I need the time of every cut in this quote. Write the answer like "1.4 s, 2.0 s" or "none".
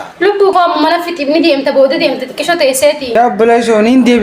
3.2 s